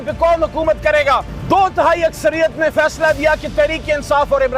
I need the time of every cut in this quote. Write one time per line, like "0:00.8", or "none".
0:01.3

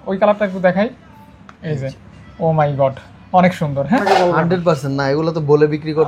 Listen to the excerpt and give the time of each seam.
0:04.0

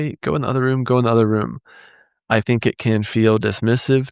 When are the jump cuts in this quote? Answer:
none

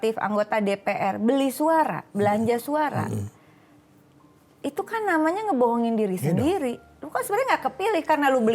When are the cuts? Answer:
none

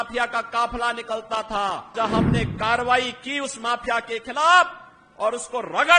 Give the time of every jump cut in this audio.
0:01.9

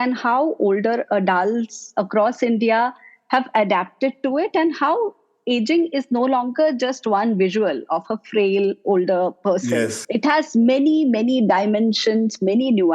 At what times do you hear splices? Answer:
0:10.0

